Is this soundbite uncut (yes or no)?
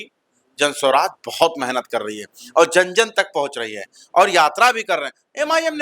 yes